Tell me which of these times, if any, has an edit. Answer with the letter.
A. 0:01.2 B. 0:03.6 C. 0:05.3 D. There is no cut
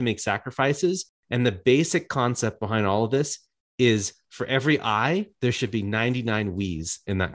A